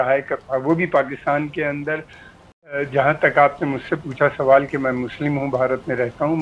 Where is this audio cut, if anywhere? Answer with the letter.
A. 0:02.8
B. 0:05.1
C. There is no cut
A